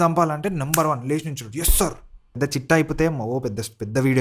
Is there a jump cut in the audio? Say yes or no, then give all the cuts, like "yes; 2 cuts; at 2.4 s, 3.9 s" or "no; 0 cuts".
yes; 1 cut; at 2.3 s